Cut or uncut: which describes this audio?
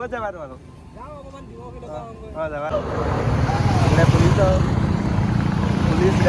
cut